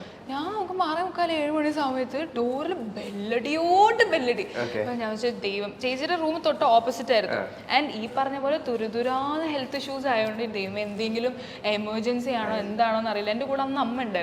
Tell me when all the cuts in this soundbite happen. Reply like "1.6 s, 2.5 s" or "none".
none